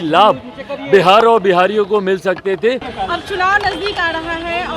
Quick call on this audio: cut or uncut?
cut